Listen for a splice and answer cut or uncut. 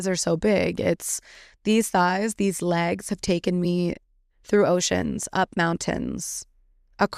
uncut